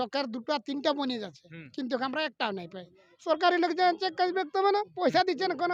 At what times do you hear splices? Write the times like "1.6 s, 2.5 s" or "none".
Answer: none